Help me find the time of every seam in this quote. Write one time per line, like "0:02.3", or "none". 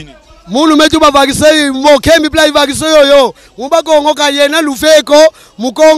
none